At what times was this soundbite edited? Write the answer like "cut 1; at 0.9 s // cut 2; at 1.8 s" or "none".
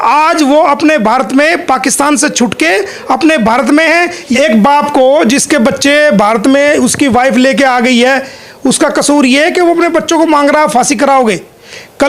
cut 1; at 4.2 s